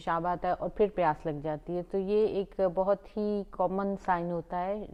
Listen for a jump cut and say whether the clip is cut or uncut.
uncut